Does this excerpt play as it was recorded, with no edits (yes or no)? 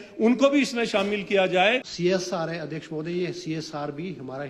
no